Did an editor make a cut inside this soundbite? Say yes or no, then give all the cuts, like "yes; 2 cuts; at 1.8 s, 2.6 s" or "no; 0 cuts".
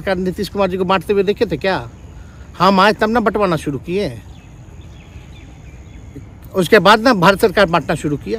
no; 0 cuts